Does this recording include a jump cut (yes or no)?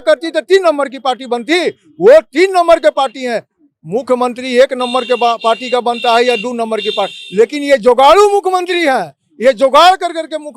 no